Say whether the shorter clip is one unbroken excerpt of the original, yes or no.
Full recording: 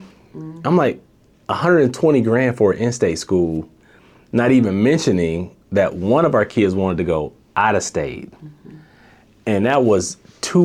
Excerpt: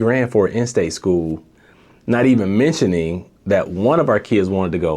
yes